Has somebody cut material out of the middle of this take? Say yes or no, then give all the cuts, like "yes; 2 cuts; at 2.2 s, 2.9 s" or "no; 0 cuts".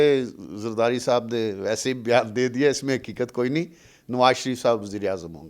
no; 0 cuts